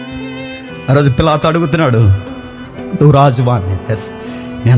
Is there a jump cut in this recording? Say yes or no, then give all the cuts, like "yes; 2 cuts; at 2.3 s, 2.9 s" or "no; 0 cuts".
no; 0 cuts